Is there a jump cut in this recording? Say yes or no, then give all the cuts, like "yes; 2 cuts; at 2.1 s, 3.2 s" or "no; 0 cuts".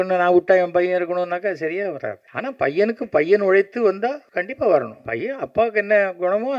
yes; 3 cuts; at 2.3 s, 4.3 s, 5.0 s